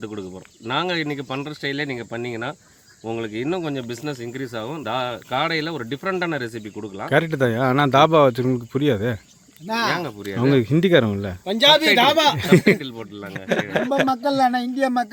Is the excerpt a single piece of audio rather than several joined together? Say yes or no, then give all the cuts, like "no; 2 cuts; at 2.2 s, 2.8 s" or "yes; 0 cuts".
yes; 0 cuts